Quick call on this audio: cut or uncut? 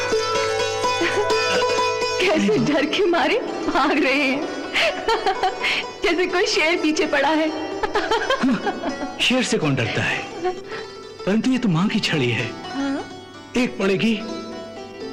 uncut